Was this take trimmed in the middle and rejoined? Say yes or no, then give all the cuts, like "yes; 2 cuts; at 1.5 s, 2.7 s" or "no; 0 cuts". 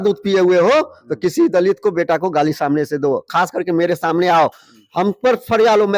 no; 0 cuts